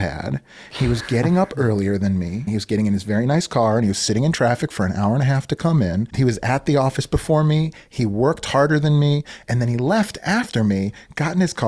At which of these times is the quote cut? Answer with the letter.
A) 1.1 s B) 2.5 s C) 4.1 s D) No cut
B